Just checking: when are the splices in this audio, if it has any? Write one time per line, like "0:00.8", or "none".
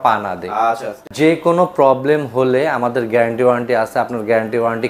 0:01.0